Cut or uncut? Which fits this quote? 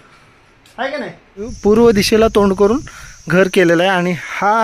cut